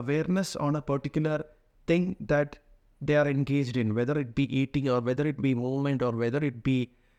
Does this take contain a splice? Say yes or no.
no